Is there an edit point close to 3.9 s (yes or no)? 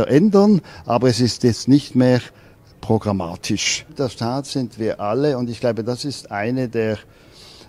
yes